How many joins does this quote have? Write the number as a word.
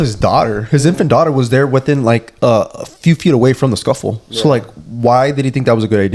zero